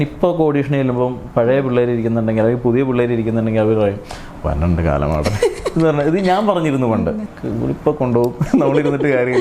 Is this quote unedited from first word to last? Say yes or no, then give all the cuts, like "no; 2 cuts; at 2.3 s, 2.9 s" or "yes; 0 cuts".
no; 1 cut; at 7.4 s